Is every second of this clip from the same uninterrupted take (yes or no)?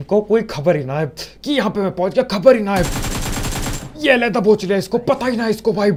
yes